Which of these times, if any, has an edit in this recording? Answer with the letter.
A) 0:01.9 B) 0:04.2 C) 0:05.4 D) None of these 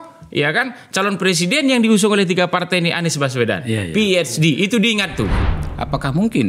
C